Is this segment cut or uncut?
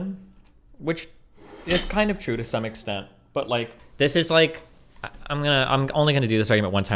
cut